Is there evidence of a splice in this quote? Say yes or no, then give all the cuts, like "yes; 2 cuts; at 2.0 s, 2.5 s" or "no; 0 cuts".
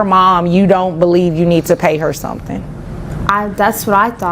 yes; 1 cut; at 3.1 s